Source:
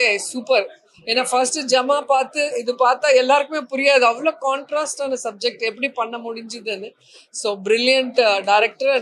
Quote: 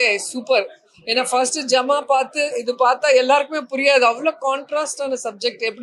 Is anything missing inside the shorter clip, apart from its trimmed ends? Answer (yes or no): no